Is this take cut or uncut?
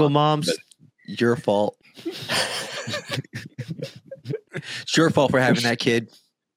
cut